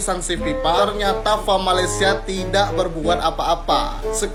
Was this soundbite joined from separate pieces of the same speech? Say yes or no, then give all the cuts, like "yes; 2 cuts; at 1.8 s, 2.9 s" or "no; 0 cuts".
no; 0 cuts